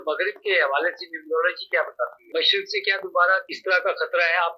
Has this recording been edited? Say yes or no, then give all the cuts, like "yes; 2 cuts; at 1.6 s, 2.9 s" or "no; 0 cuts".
yes; 2 cuts; at 2.3 s, 3.5 s